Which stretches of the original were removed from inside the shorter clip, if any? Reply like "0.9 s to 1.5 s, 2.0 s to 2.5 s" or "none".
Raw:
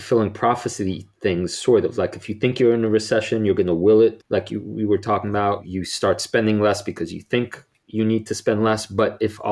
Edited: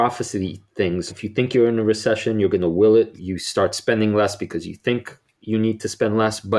1.6 s to 2.2 s, 4.2 s to 5.6 s